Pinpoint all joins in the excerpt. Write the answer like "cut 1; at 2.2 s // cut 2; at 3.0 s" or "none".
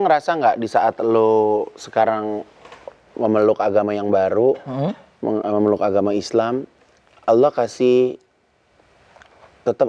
none